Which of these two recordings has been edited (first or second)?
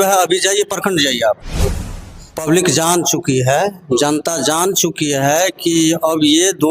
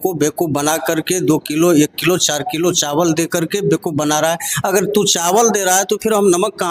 first